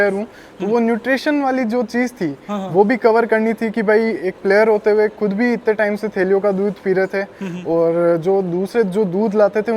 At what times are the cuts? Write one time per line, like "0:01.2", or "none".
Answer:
none